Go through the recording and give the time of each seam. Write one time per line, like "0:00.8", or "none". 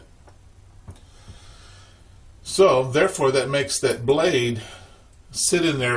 none